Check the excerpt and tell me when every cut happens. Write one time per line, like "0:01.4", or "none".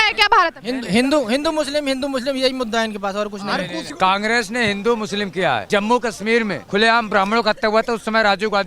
0:03.9
0:05.6
0:06.6